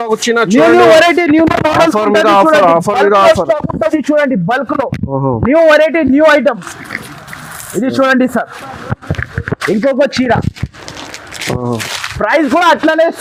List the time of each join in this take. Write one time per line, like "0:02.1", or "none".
none